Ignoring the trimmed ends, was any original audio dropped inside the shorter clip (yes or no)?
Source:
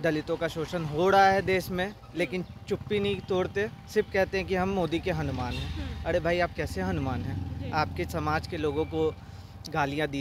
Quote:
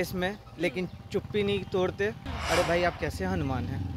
yes